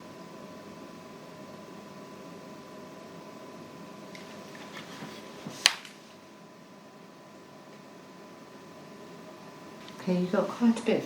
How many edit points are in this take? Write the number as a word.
two